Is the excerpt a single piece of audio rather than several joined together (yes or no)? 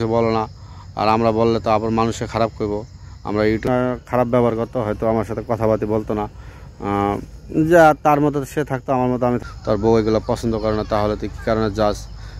no